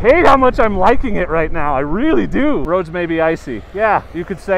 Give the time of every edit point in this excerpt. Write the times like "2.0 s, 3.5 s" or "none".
2.6 s